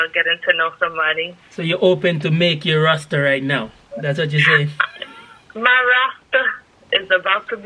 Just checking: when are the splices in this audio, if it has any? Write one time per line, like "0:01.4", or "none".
none